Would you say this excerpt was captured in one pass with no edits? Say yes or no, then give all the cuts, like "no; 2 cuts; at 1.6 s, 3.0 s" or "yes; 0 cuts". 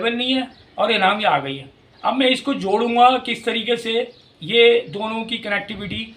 no; 1 cut; at 1.9 s